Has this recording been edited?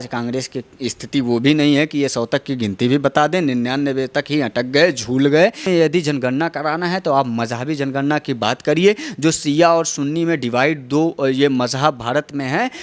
yes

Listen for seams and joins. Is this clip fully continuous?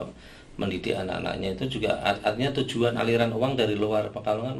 yes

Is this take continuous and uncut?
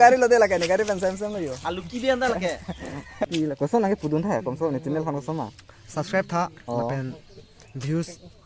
no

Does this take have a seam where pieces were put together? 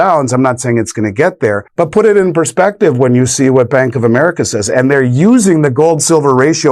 yes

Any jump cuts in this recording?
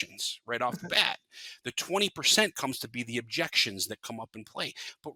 no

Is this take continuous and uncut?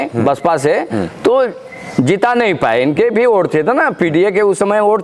yes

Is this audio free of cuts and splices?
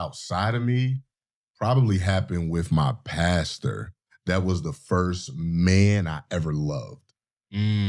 yes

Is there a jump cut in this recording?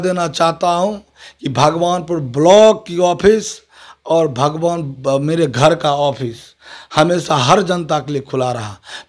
no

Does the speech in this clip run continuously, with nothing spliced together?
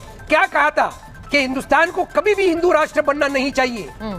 yes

